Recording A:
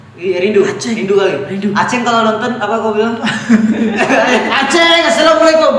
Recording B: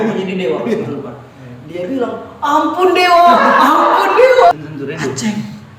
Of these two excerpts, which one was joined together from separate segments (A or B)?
B